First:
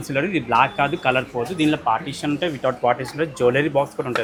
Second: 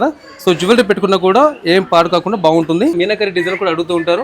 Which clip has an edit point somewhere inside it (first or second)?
second